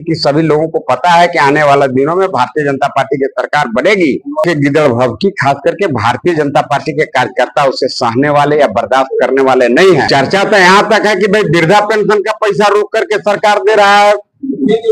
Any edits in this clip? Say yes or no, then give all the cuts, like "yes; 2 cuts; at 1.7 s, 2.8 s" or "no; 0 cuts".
yes; 2 cuts; at 4.4 s, 10.1 s